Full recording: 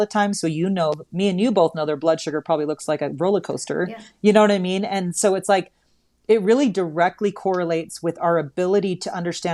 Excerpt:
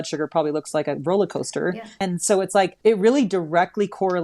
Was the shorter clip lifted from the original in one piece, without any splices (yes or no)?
no